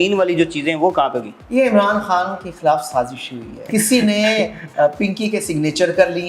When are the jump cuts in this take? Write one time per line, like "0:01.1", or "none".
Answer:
0:01.3
0:03.6

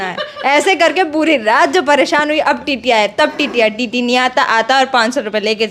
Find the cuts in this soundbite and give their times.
none

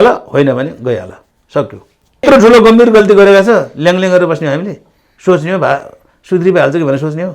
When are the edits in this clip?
0:02.2

